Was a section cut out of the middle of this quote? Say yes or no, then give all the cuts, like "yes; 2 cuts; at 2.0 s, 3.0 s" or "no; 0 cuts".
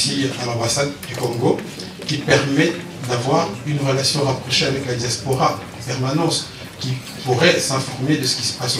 no; 0 cuts